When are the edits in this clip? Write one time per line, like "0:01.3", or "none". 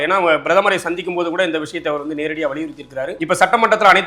0:03.1

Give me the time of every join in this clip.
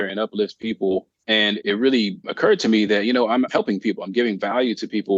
0:01.1
0:02.2

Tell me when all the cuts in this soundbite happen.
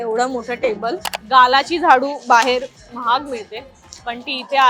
0:01.1

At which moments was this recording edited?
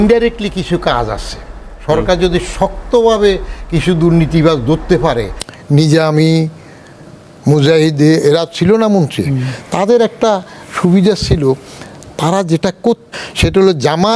0:05.3
0:13.1

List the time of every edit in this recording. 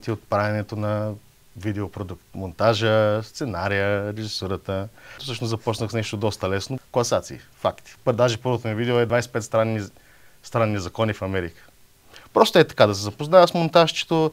0:05.3
0:06.7
0:09.1

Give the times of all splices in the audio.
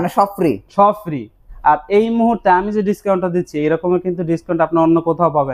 0:01.5

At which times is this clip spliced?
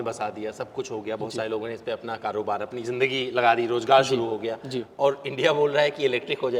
none

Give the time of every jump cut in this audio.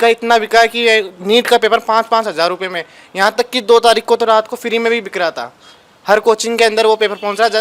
none

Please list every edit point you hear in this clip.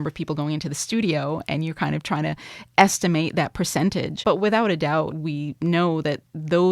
0:04.2
0:05.1

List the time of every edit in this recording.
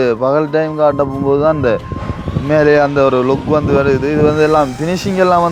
none

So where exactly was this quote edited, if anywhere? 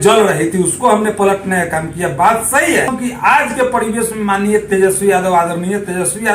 0:02.9

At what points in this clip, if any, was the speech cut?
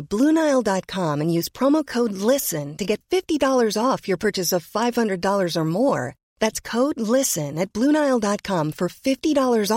none

